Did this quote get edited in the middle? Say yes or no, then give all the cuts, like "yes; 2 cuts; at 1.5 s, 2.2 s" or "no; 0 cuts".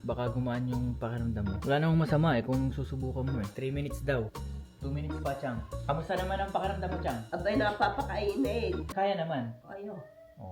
no; 0 cuts